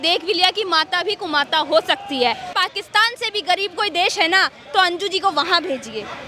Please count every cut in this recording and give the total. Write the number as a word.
one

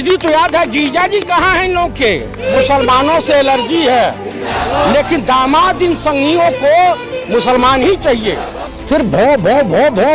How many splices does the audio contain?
two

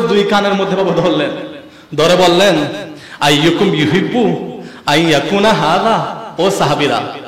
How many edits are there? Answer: zero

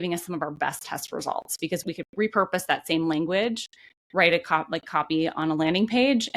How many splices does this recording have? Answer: one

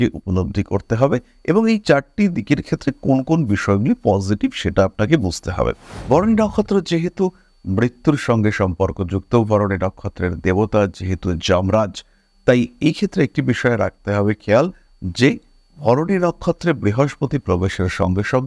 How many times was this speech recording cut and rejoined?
one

